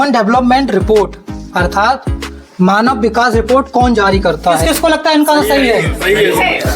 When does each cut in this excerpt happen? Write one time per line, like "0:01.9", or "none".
0:04.6